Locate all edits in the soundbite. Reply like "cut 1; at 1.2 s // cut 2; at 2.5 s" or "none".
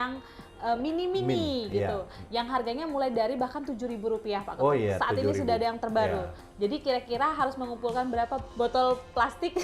cut 1; at 6.4 s // cut 2; at 8.5 s